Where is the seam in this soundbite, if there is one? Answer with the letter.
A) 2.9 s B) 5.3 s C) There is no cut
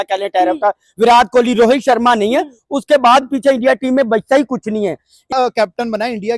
B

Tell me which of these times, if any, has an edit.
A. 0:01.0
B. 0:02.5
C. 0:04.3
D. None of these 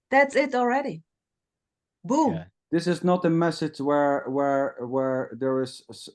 B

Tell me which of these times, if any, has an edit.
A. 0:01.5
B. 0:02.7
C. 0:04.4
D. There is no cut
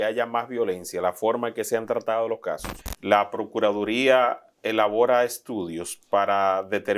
B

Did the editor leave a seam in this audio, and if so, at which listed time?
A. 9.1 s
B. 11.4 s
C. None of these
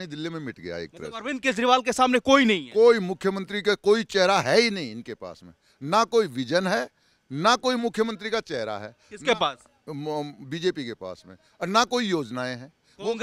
C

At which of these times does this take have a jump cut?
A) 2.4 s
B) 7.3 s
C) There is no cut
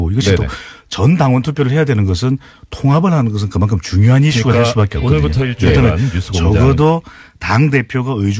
C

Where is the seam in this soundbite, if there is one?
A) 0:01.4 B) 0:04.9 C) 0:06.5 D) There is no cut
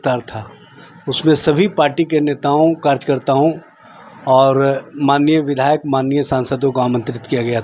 D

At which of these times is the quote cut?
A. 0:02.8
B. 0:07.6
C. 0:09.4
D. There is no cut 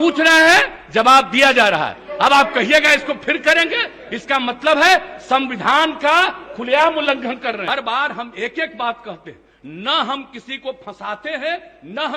B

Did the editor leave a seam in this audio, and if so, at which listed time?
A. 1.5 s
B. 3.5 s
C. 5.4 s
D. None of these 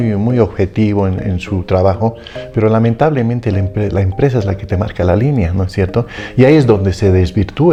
D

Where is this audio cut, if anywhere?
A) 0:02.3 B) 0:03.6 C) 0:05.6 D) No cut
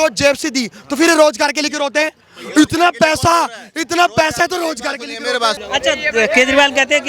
C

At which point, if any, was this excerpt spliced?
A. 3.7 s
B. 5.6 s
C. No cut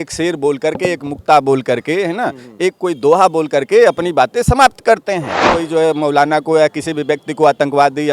B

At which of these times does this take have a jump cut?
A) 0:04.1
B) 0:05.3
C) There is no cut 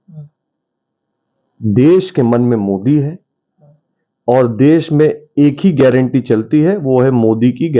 C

